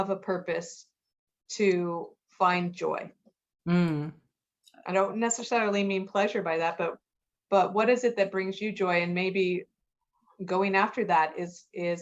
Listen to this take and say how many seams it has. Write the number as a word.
zero